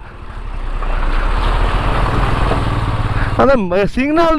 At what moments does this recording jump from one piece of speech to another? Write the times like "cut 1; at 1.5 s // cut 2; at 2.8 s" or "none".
none